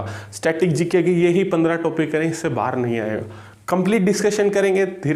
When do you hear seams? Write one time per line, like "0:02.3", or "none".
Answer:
none